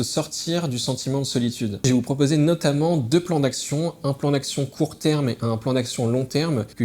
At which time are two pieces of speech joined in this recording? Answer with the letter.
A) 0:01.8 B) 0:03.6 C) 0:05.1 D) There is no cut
A